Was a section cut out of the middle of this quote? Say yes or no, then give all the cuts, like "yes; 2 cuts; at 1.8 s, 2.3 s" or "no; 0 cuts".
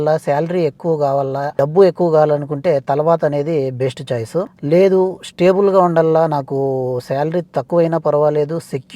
yes; 2 cuts; at 1.5 s, 4.6 s